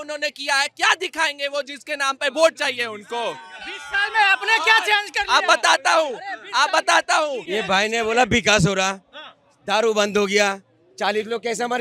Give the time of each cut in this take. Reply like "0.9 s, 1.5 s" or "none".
7.4 s